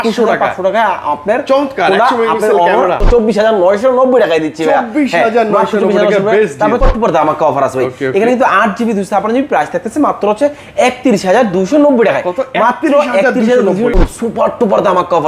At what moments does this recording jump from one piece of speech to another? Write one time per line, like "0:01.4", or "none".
0:03.0
0:06.8
0:13.9